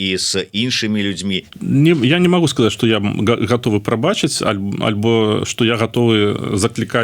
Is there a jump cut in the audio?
yes; 1 cut; at 1.5 s

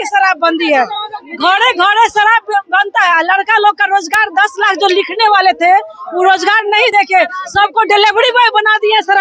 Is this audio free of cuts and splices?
yes; 0 cuts

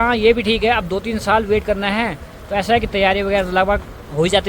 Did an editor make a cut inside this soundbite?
no; 0 cuts

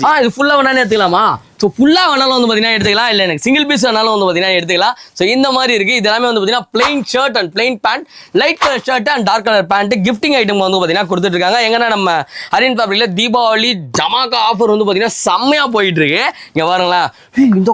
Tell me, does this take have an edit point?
no; 0 cuts

